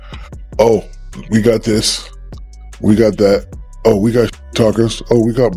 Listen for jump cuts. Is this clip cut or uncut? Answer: uncut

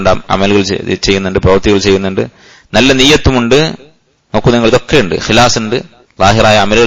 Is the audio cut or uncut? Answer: uncut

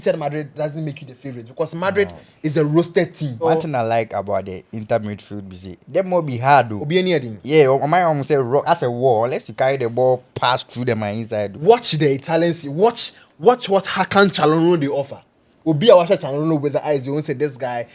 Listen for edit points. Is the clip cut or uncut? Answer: cut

